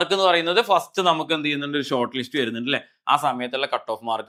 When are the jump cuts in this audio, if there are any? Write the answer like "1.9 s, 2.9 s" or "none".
none